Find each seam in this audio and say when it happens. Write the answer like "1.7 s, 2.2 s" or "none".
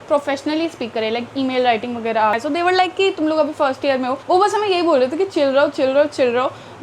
2.4 s